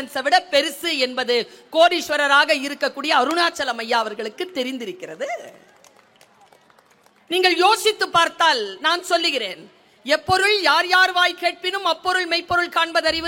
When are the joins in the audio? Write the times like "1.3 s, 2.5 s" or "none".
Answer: none